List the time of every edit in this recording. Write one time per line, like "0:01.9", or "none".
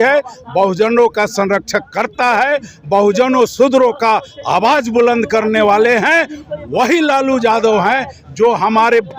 none

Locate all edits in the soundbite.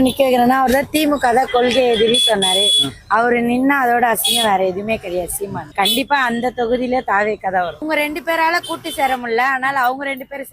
0:05.7
0:07.8

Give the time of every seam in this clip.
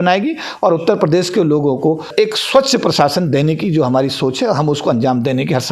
0:02.1

